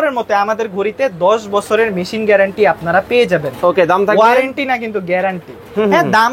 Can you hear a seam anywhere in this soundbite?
no; 0 cuts

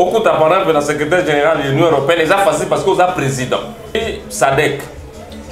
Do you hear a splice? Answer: yes; 1 cut; at 4.0 s

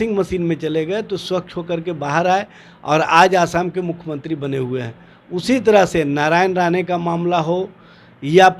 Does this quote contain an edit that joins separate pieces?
no; 0 cuts

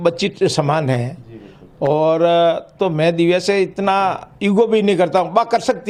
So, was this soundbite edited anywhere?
no; 0 cuts

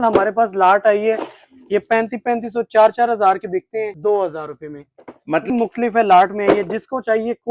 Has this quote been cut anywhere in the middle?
yes; 2 cuts; at 3.9 s, 5.5 s

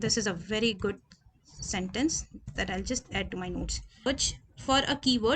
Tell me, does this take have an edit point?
yes; 1 cut; at 4.1 s

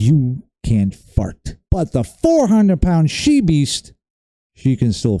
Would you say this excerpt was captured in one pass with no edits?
no; 1 cut; at 1.7 s

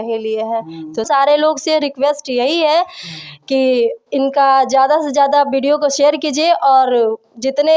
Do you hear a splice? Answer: yes; 1 cut; at 1.1 s

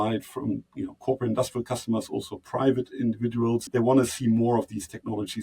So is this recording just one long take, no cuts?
no; 1 cut; at 3.7 s

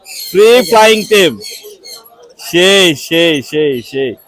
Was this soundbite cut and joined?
no; 0 cuts

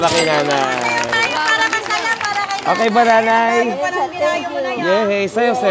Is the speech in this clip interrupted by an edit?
no; 0 cuts

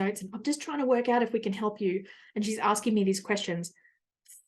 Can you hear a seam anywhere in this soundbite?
no; 0 cuts

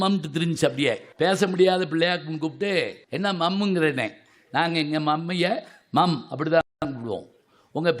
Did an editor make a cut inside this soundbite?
yes; 2 cuts; at 1.1 s, 3.0 s

